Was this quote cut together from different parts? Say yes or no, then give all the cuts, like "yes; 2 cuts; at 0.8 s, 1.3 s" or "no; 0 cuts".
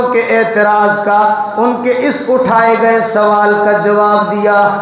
no; 0 cuts